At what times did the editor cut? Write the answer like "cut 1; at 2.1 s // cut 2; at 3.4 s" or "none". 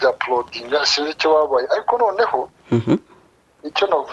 none